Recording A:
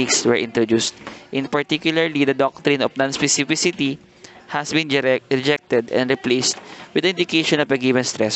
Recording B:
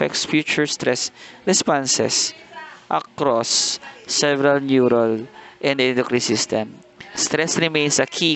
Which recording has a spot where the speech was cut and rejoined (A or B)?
B